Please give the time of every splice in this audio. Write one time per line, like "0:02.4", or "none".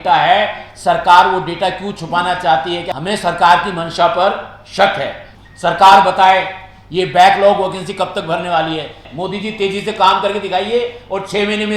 0:02.9
0:05.2
0:09.0

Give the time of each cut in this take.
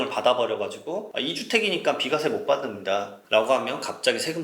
0:01.1

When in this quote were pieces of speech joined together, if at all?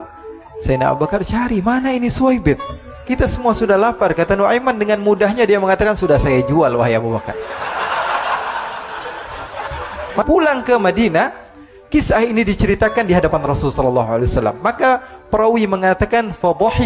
0:10.2

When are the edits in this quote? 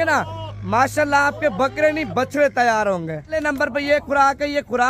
0:03.4

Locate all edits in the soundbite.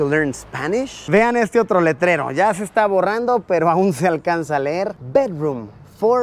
0:01.0

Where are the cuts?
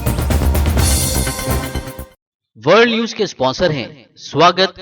0:02.1

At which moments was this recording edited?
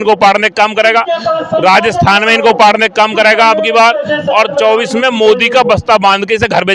none

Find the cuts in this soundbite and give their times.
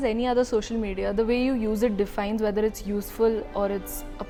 none

